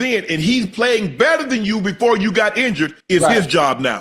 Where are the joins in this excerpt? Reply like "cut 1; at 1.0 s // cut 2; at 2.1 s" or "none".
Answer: cut 1; at 2.9 s